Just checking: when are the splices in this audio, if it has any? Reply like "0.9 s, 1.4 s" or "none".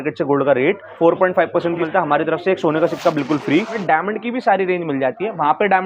0.9 s, 1.8 s, 3.7 s